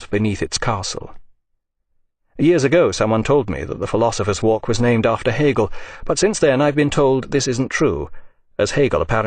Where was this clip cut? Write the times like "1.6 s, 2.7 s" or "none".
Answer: 6.5 s